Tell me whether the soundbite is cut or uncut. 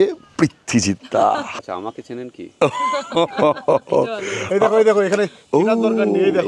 cut